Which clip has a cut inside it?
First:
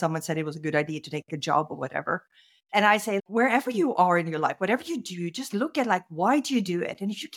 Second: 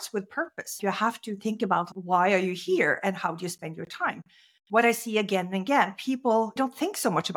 second; 3 cuts; at 0.8 s, 1.9 s, 6.6 s

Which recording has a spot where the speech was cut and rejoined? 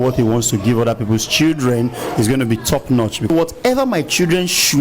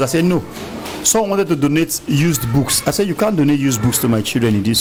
first; 1 cut; at 3.3 s

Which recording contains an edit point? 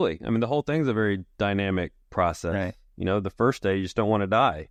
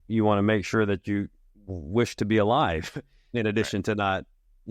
second; 1 cut; at 3.3 s

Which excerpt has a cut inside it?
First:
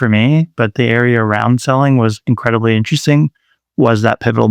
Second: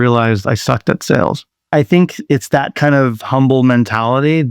second; 1 cut; at 2.2 s

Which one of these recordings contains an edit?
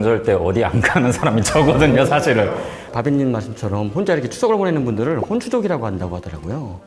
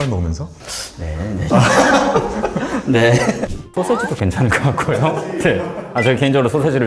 second; 1 cut; at 3.6 s

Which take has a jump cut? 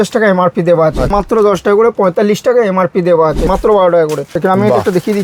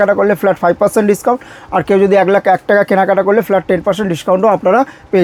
first; 3 cuts; at 1.1 s, 3.5 s, 4.3 s

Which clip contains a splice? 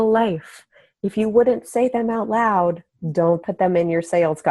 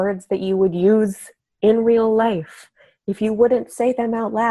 first; 1 cut; at 3.5 s

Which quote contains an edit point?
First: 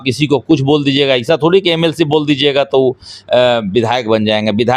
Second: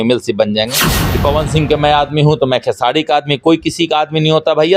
second; 1 cut; at 1.0 s

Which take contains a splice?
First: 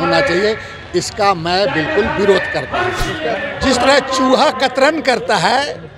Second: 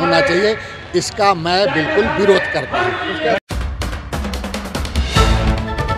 first; 1 cut; at 3.5 s

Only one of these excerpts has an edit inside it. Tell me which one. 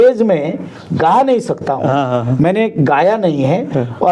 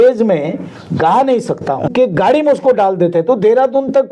second; 1 cut; at 1.9 s

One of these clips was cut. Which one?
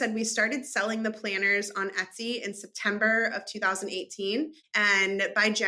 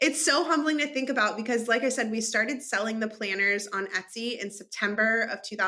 first; 1 cut; at 4.6 s

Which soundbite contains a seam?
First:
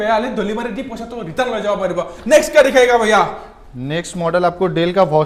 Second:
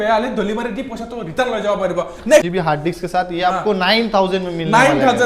second; 1 cut; at 2.5 s

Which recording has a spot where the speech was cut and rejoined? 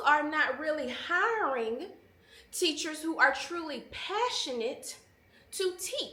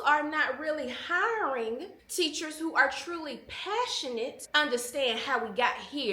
second; 2 cuts; at 2.0 s, 4.4 s

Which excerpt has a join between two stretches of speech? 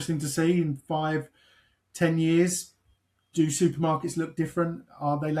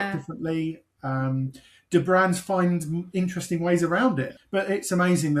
second; 1 cut; at 4.4 s

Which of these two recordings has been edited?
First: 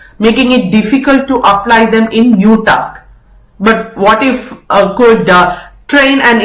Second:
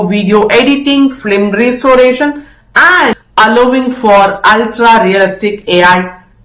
second; 1 cut; at 3.2 s

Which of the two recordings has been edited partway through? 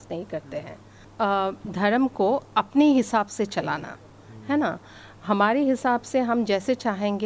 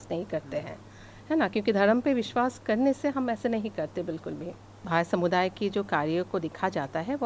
first; 1 cut; at 1.0 s

